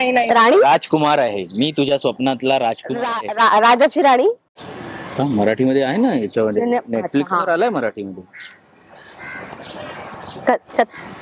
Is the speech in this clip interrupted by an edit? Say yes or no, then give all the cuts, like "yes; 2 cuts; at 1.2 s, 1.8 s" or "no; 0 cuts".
yes; 1 cut; at 4.5 s